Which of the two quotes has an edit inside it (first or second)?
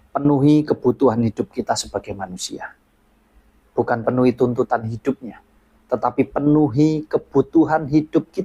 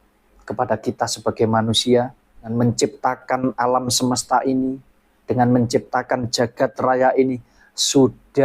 second